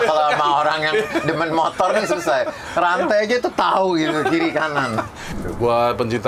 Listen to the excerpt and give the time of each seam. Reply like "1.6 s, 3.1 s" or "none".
5.3 s